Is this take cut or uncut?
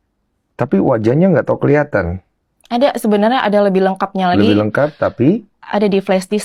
uncut